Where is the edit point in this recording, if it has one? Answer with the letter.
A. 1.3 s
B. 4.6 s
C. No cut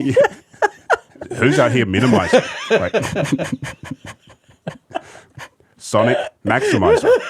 A